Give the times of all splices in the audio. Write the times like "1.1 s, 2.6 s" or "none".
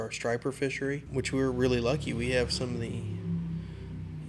1.1 s